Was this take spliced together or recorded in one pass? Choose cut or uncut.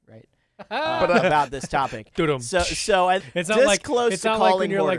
cut